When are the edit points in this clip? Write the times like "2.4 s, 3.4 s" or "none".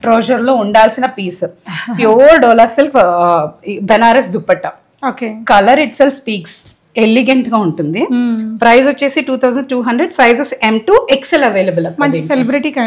none